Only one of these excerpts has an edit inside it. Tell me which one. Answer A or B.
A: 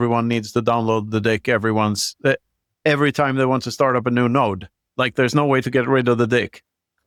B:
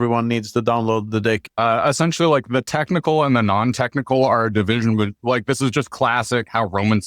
B